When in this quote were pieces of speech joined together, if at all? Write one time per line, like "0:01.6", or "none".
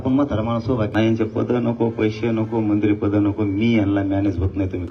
0:00.9